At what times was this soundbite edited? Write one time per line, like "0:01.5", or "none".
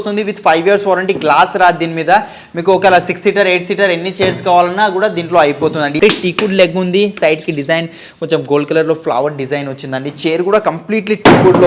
0:06.0